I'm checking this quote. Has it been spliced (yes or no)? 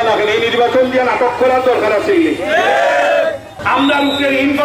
yes